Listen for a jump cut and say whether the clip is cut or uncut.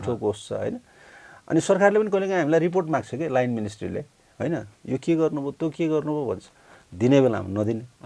uncut